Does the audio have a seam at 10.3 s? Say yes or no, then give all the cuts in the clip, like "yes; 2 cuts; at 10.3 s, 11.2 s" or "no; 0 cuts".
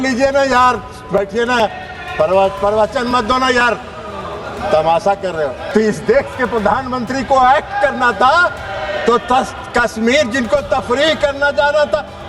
no; 1 cut; at 5.6 s